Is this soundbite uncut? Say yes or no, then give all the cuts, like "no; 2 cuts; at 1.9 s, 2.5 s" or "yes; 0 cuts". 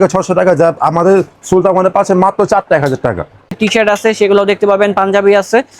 no; 1 cut; at 3.5 s